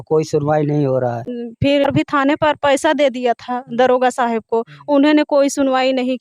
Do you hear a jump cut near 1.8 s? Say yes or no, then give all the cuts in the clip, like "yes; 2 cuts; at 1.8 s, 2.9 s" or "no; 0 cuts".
yes; 1 cut; at 1.8 s